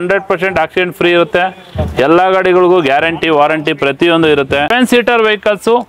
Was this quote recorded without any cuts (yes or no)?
no